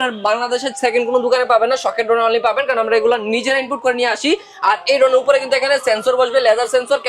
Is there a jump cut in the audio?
no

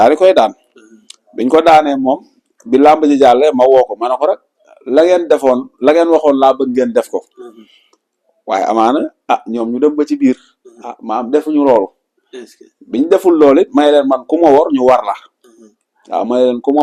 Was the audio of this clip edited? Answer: no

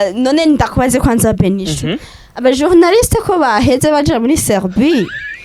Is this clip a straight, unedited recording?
yes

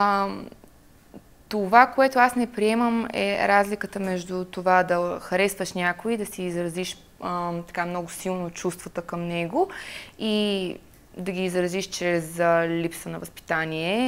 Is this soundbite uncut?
yes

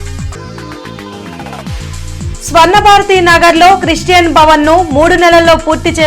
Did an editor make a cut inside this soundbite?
yes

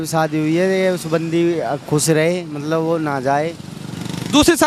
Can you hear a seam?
no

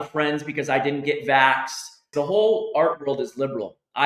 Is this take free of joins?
no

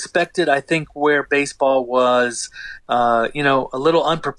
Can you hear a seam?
no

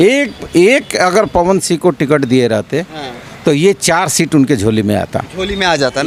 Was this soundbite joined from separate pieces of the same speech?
no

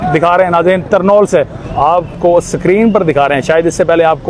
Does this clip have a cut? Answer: yes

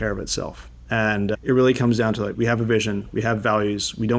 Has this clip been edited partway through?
yes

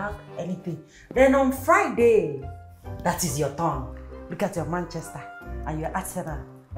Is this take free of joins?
no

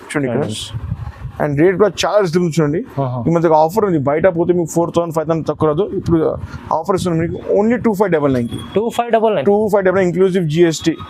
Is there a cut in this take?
no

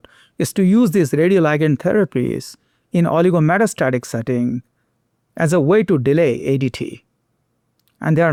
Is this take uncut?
yes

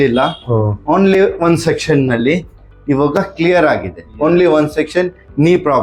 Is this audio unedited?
yes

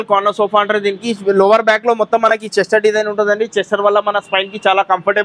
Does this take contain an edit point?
no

